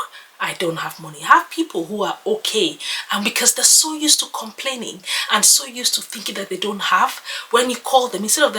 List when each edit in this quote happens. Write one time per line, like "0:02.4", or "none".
none